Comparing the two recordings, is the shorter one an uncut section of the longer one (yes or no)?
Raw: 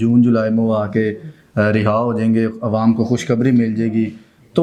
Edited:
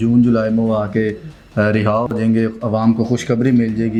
yes